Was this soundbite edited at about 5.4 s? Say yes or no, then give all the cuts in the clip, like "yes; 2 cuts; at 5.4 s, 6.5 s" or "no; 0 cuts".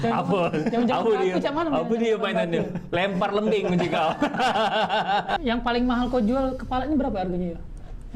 yes; 1 cut; at 5.4 s